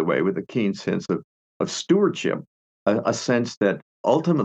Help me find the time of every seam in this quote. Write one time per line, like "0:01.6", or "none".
0:02.5